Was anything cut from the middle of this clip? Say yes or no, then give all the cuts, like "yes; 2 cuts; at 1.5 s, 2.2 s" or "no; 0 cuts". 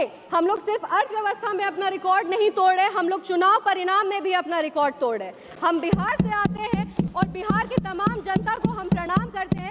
no; 0 cuts